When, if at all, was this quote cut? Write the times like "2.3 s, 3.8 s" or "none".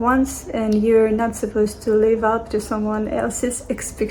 none